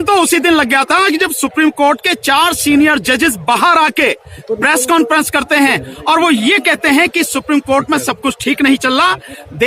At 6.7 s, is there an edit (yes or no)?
no